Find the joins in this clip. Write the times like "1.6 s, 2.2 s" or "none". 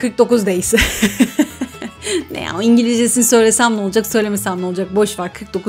none